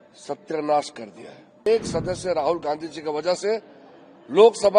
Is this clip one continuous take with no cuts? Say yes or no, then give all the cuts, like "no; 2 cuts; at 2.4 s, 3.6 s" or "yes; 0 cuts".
no; 1 cut; at 1.7 s